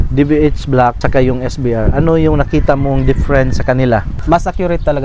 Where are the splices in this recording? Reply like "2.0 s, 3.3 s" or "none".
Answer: 1.0 s, 4.1 s